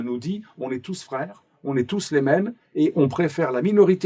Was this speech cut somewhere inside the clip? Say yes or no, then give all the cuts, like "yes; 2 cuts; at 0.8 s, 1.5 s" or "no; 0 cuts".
no; 0 cuts